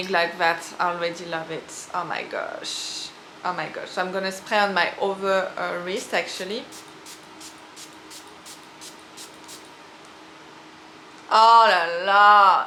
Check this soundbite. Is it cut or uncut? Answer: uncut